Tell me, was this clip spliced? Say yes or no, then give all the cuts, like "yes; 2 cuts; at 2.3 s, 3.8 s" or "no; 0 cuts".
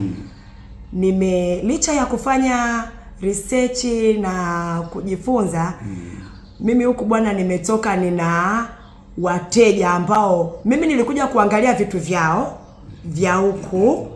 no; 0 cuts